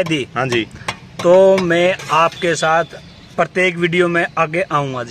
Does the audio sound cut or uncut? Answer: uncut